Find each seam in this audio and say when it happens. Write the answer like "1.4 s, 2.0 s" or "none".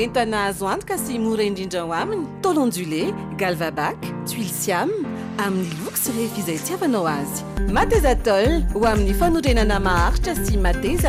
none